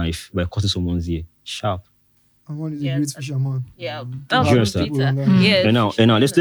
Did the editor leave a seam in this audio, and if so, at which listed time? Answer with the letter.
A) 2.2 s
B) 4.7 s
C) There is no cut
C